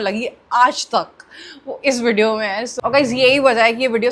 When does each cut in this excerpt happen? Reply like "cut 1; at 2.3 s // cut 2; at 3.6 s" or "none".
cut 1; at 2.7 s